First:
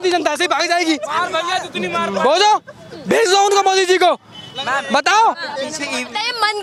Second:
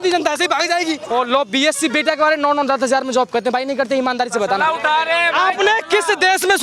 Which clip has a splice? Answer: second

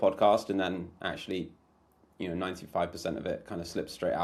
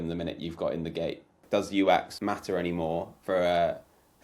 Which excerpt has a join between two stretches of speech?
second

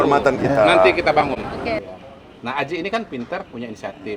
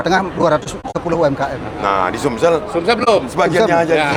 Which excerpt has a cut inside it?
first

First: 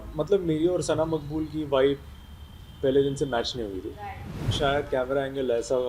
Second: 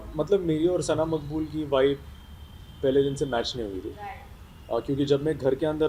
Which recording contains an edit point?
first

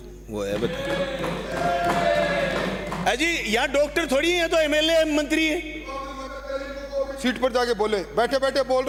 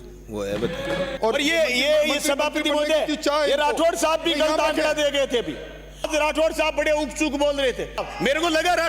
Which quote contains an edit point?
second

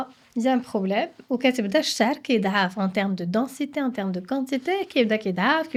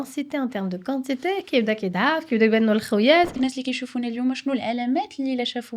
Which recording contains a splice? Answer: second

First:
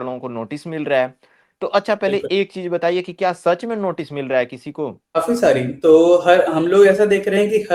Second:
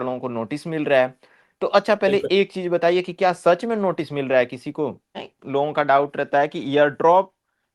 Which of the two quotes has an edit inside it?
second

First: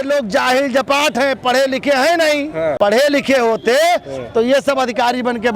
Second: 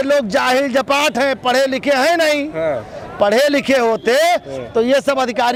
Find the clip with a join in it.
first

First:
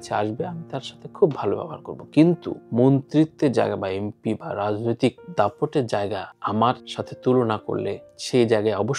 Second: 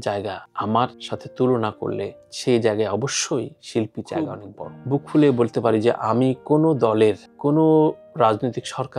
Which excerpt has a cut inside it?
second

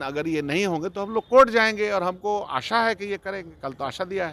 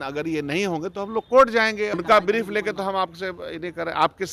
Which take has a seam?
second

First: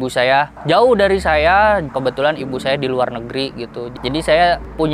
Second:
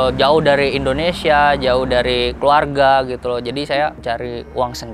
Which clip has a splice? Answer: first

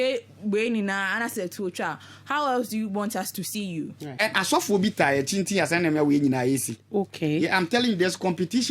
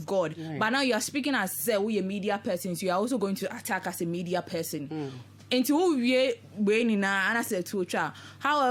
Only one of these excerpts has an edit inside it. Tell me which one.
first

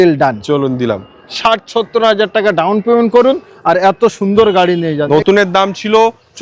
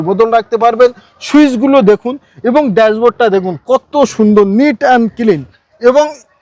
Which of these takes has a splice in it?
first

